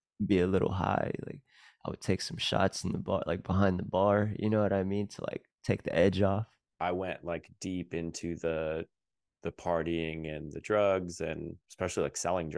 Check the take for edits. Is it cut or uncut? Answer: cut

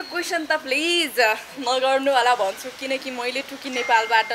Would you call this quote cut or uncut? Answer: uncut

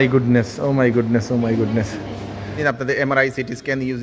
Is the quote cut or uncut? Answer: cut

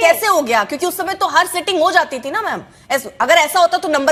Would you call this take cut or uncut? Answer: uncut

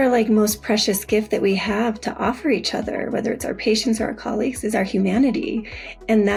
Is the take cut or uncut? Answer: uncut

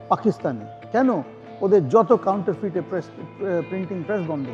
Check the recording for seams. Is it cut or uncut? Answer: uncut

